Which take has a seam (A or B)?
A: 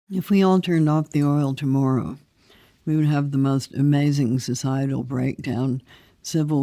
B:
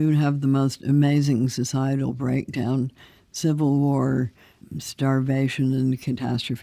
B